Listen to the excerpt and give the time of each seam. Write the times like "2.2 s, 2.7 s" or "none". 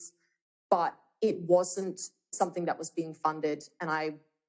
2.3 s